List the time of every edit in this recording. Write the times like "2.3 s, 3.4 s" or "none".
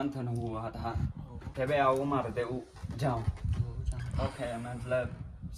1.4 s